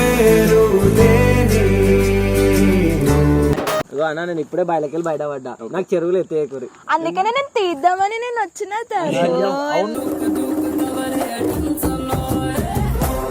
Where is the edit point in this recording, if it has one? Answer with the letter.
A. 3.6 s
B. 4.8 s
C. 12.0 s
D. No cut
A